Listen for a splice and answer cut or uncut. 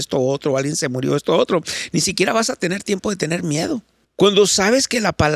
cut